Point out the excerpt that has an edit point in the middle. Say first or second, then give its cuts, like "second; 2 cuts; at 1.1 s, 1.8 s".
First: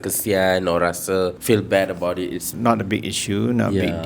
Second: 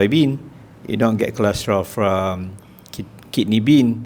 first; 2 cuts; at 1.4 s, 2.5 s